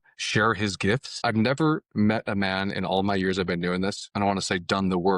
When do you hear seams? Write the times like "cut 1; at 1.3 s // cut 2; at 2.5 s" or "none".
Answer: cut 1; at 1.1 s // cut 2; at 4.0 s